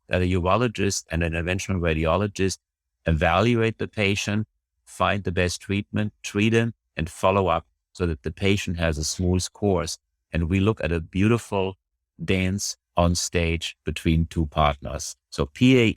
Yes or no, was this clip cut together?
yes